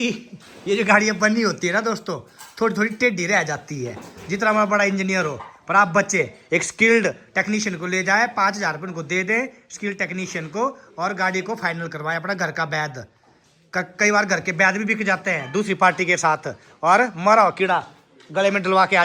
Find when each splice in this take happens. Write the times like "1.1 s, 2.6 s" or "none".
none